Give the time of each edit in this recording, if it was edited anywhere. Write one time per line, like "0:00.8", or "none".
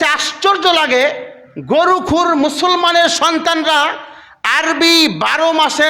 none